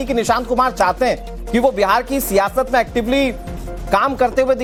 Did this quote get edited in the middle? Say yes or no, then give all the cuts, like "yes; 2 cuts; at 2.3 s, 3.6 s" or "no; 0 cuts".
no; 0 cuts